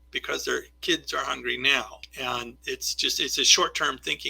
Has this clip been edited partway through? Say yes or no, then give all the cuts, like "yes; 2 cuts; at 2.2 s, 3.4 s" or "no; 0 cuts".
yes; 1 cut; at 2.0 s